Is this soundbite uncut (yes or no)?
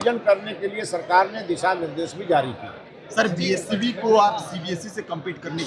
yes